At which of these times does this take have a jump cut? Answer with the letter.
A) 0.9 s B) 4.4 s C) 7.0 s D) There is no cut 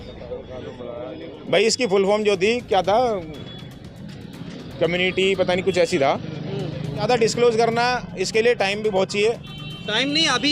C